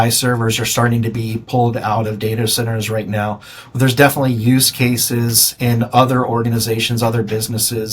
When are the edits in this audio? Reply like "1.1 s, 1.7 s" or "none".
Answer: none